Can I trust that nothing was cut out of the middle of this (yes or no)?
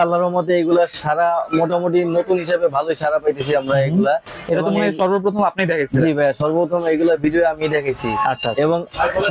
yes